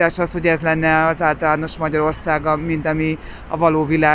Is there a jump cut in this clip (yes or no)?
no